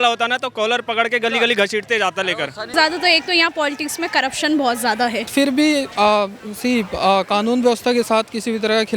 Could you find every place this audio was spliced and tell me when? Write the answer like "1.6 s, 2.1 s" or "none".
2.7 s, 5.3 s